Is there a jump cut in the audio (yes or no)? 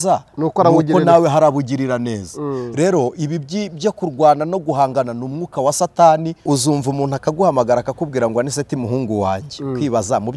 yes